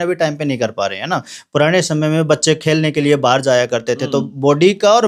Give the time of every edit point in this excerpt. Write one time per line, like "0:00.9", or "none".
none